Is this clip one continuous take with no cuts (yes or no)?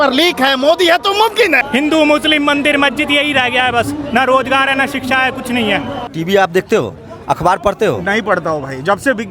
no